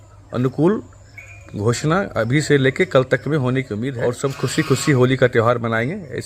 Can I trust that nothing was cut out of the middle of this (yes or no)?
no